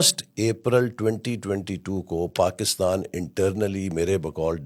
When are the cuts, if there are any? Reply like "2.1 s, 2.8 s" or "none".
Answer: none

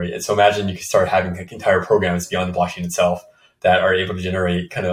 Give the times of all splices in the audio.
none

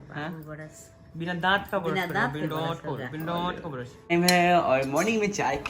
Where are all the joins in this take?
4.1 s

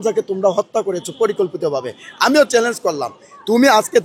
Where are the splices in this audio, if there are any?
none

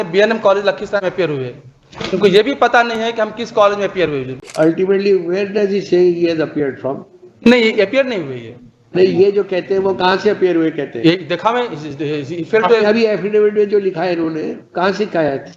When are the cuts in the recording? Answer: 4.3 s

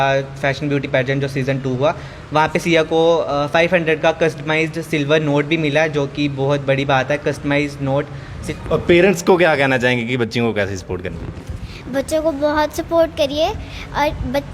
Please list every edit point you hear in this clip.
8.4 s

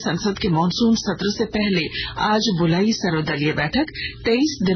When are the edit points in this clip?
none

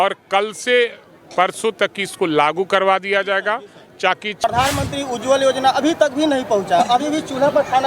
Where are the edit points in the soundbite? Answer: 4.4 s

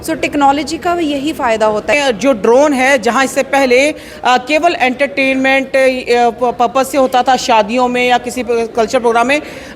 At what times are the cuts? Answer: 1.9 s

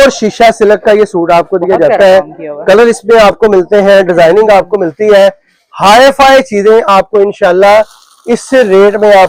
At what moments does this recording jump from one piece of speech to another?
none

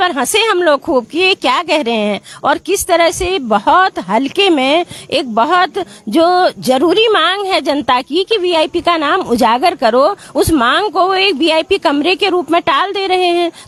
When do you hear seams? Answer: none

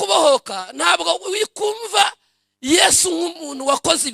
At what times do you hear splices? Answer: none

